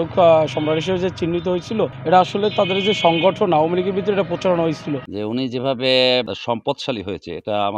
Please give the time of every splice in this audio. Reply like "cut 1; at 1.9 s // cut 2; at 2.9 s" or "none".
cut 1; at 2.0 s // cut 2; at 5.1 s // cut 3; at 6.3 s